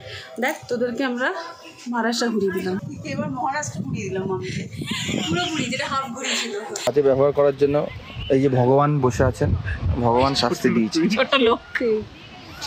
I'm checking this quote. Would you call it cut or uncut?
cut